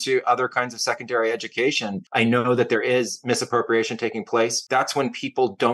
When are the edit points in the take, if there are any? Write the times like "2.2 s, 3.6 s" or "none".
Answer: 2.0 s, 4.6 s